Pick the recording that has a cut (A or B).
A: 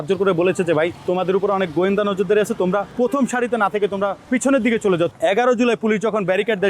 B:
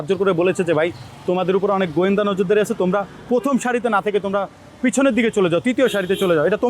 A